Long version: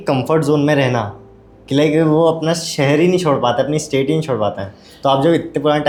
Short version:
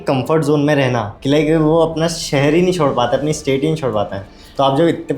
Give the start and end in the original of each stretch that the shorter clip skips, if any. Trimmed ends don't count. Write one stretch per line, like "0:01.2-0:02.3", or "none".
0:01.1-0:01.6